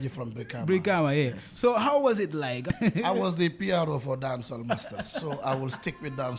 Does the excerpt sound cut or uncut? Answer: cut